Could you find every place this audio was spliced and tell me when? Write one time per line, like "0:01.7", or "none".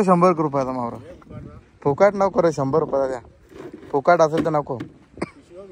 none